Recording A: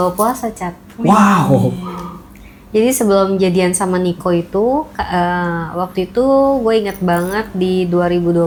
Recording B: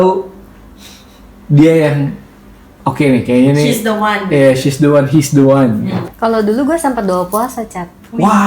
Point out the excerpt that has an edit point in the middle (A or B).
B